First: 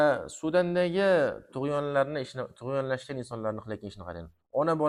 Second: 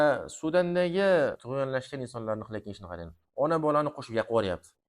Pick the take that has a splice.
second; 1 cut; at 1.4 s

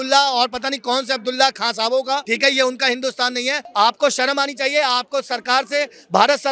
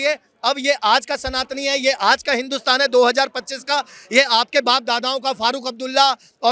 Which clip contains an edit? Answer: first; 2 cuts; at 2.3 s, 3.6 s

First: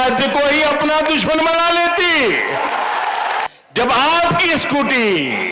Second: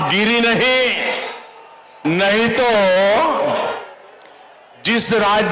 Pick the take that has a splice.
first; 1 cut; at 3.5 s

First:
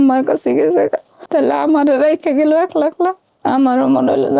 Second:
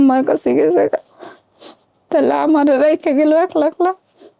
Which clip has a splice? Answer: first; 2 cuts; at 1.1 s, 3.3 s

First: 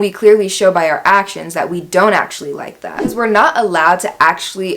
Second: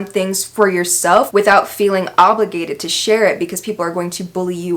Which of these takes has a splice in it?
first; 1 cut; at 3.1 s

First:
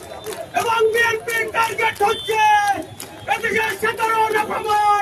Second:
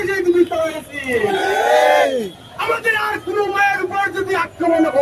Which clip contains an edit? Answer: second; 1 cut; at 2.4 s

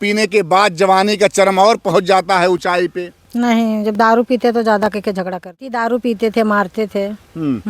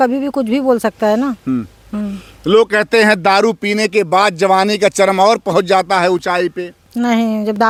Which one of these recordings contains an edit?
first; 1 cut; at 5.7 s

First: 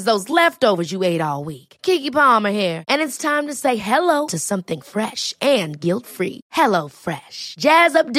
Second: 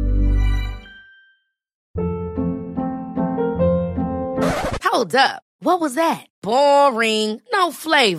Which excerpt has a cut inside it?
second; 1 cut; at 1.7 s

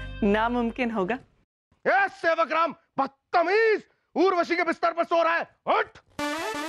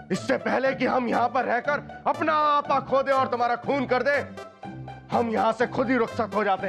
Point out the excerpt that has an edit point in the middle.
first; 1 cut; at 1.5 s

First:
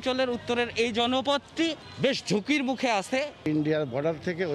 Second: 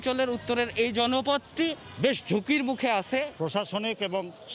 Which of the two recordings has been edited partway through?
second; 1 cut; at 3.3 s

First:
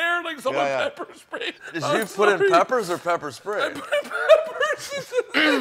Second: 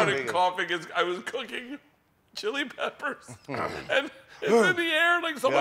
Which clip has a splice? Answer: first; 1 cut; at 1.6 s

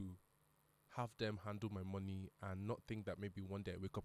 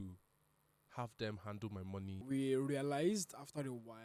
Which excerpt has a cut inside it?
second; 1 cut; at 2.2 s

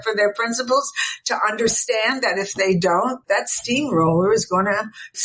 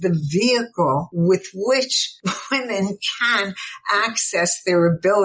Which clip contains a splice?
second; 2 cuts; at 1.1 s, 2.0 s

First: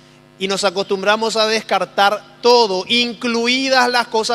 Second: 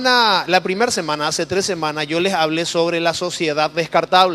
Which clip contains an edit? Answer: first; 1 cut; at 1.4 s

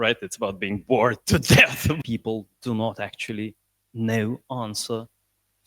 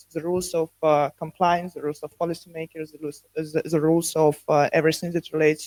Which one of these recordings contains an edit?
first; 1 cut; at 2.0 s

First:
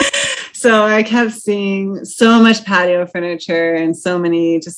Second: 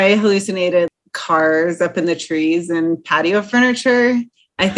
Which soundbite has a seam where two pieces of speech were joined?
second; 1 cut; at 0.9 s

